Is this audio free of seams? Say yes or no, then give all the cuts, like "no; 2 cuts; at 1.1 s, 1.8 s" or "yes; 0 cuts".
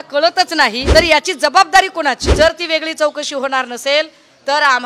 no; 2 cuts; at 0.8 s, 2.2 s